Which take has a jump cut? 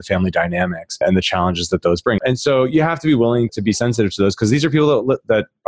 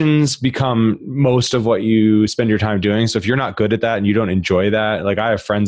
first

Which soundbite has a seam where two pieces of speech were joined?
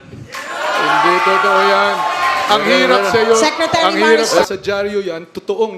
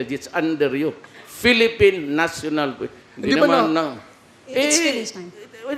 first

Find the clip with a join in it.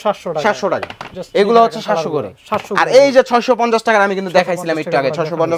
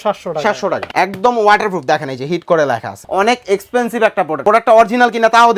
second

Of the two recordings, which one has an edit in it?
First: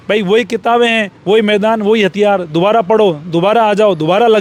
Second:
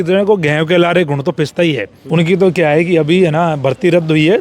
second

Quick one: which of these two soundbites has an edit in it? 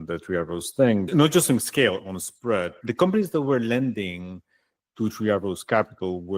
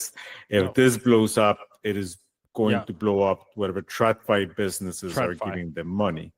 first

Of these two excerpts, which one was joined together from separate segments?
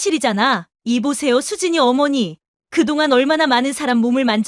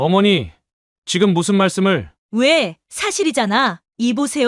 second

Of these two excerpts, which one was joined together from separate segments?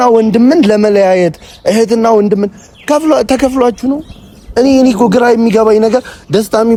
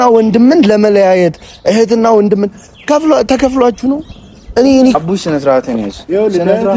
second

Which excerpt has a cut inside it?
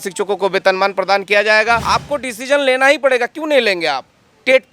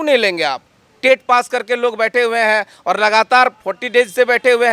first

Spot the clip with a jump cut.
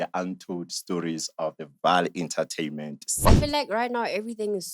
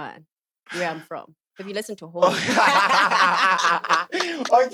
first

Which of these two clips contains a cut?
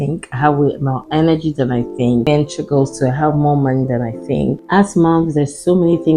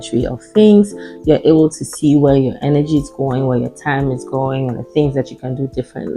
first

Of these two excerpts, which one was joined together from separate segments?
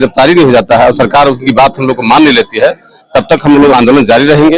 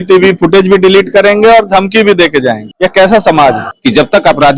second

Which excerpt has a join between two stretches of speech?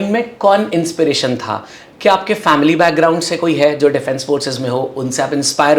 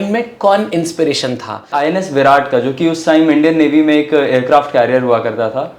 second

